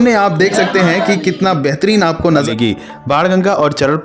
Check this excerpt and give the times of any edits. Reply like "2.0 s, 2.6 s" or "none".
2.5 s